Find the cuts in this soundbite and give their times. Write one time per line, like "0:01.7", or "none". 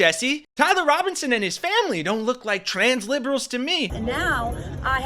0:03.9